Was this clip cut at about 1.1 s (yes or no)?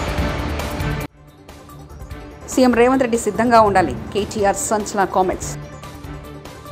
yes